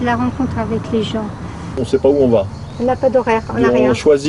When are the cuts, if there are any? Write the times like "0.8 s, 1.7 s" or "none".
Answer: 1.8 s